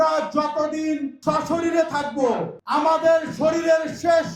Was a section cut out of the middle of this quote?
yes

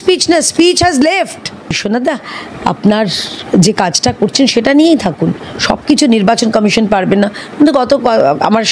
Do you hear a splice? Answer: yes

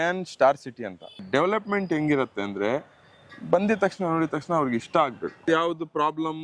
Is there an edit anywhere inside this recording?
yes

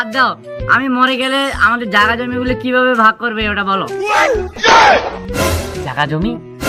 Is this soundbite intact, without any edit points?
yes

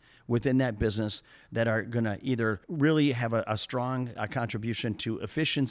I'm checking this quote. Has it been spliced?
yes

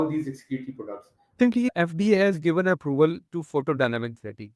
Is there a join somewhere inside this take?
yes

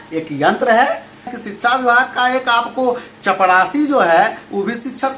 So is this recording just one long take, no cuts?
no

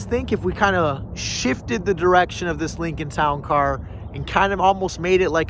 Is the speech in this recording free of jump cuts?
yes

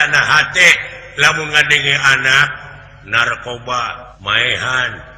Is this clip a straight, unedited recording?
no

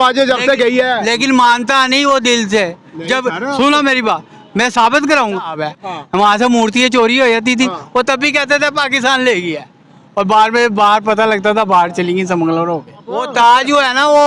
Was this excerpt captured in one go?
no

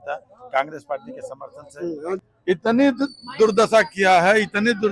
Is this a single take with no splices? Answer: no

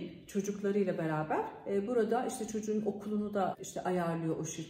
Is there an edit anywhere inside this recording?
yes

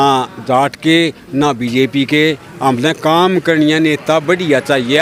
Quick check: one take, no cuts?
yes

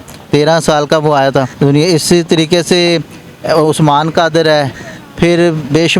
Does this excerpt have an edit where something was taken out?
yes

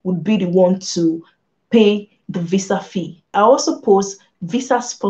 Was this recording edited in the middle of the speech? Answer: yes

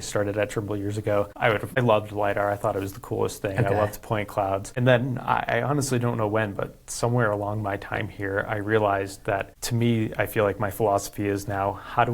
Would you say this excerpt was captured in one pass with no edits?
no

